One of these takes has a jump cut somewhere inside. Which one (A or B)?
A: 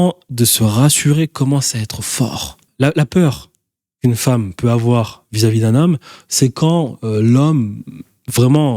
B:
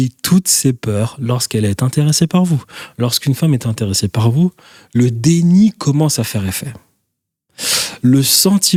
A